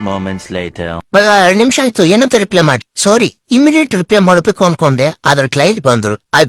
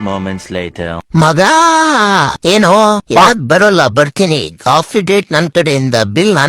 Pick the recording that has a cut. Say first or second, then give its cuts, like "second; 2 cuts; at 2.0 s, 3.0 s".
second; 1 cut; at 1.0 s